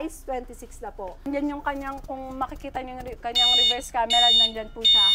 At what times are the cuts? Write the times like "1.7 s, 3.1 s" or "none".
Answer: 1.2 s